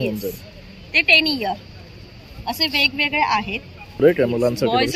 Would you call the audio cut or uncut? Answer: cut